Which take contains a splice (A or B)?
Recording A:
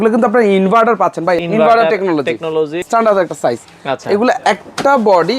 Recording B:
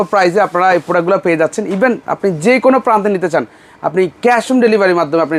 A